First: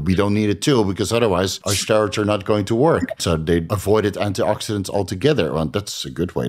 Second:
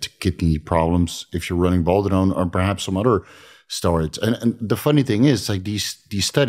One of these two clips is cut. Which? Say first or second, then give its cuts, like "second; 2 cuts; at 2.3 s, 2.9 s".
first; 2 cuts; at 1.7 s, 3.7 s